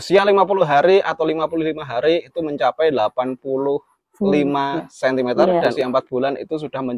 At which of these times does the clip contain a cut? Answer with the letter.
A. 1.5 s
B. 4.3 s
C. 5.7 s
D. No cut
C